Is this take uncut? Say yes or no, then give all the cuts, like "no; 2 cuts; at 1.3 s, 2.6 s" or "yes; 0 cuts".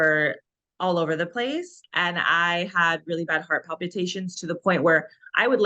no; 1 cut; at 1.8 s